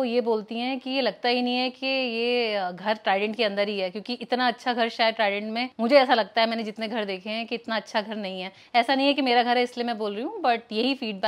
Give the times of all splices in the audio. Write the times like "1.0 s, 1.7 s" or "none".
none